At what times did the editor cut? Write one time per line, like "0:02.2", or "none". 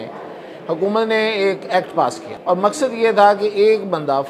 0:02.3